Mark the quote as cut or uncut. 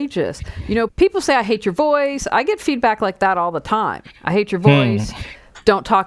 cut